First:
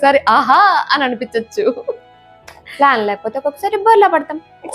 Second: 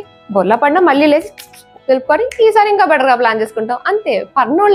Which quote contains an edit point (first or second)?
first